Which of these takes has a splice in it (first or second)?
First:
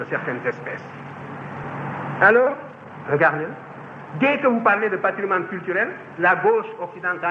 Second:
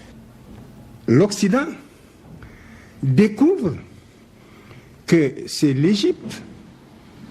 first